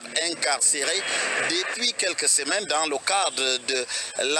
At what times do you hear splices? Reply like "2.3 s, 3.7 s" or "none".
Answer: 2.5 s

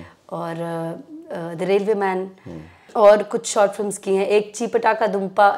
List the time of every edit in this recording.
none

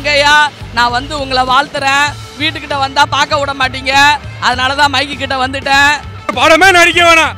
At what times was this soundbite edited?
6.3 s

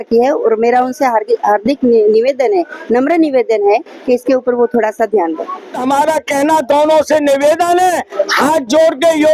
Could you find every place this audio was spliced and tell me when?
5.8 s

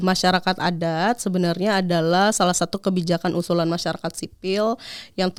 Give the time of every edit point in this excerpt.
none

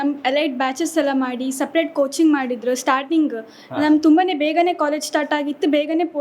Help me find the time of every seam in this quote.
none

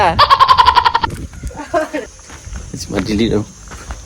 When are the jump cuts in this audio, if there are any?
2.1 s

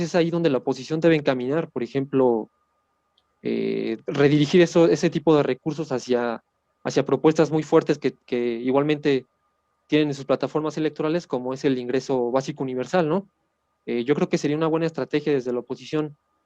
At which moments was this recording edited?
none

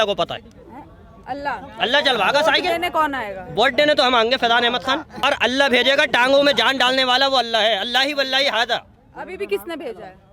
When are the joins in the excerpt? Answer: 5.2 s

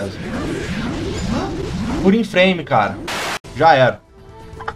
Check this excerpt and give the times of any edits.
3.1 s

